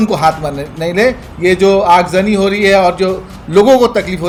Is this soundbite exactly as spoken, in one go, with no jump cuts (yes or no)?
yes